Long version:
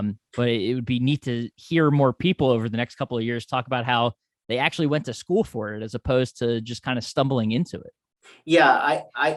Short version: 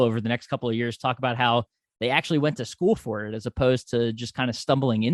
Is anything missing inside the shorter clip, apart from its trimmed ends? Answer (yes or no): no